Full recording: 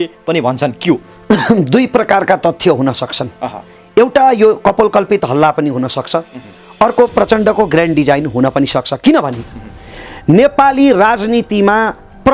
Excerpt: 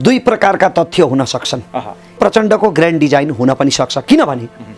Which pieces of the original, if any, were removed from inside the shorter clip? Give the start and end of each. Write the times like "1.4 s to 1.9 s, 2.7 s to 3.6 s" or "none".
3.8 s to 7.1 s